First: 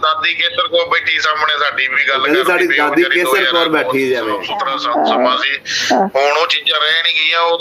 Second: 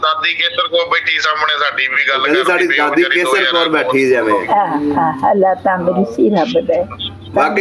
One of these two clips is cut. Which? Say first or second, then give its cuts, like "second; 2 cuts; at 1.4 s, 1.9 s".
first; 1 cut; at 4.5 s